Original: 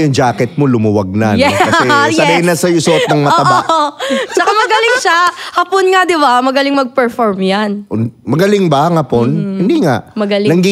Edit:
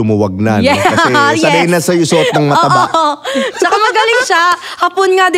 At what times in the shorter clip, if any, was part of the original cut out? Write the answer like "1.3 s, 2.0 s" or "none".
none